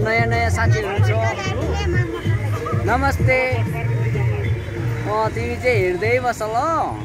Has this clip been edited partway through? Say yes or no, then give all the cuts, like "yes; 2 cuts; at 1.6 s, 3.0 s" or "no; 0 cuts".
no; 0 cuts